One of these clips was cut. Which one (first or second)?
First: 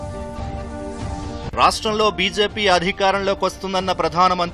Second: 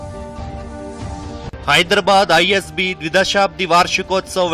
first